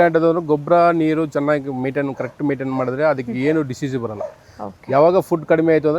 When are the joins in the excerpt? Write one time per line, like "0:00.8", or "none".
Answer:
none